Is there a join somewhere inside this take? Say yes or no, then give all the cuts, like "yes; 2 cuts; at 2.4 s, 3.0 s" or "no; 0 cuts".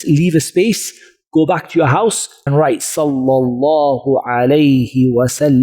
yes; 1 cut; at 2.3 s